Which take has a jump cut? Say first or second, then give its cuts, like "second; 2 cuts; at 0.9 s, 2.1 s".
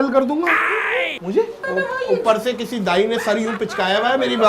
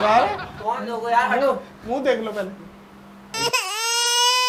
first; 1 cut; at 1.6 s